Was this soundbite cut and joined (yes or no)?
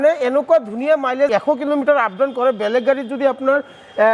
yes